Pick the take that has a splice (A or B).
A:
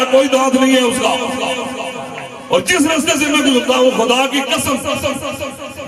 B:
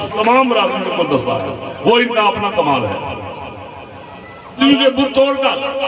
B